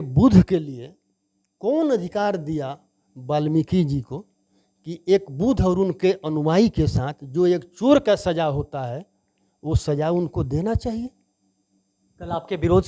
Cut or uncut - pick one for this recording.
uncut